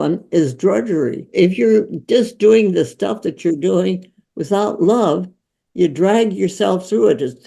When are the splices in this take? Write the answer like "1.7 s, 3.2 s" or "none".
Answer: 1.2 s